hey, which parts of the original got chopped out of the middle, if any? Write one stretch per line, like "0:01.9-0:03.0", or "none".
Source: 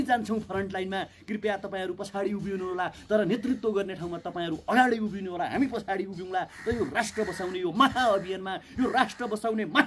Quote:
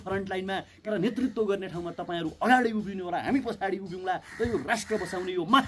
0:01.3-0:03.2

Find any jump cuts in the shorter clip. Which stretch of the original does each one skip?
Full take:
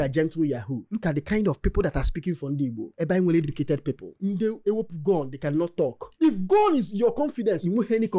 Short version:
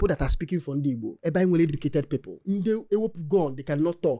none

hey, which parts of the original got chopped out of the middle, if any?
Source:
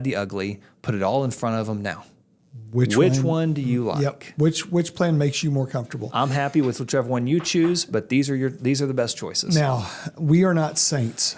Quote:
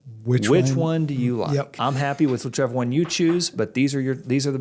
0:04.2-0:06.1

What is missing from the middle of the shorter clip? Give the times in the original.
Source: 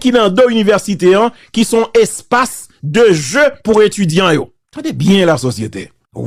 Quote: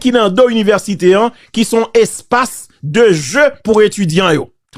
none

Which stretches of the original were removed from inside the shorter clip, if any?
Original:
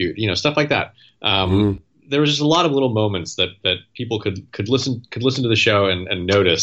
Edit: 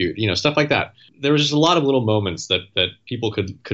0:01.0-0:01.9

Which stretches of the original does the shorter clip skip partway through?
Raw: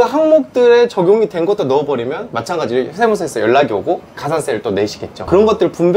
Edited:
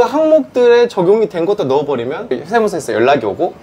0:02.3-0:02.8

